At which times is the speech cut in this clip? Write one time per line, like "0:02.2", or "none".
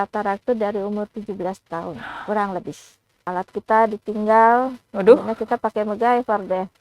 0:03.2